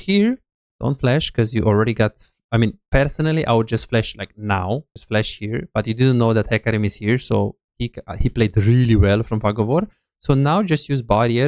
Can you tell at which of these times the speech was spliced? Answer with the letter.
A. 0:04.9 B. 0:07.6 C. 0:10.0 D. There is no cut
A